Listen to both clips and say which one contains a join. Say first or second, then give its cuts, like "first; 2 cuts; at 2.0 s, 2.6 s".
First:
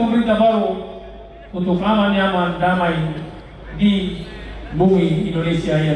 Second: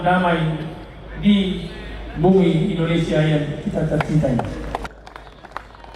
second; 1 cut; at 4.8 s